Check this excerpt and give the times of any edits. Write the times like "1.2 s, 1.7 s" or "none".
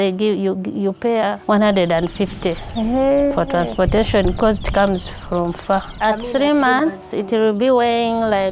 1.4 s, 5.9 s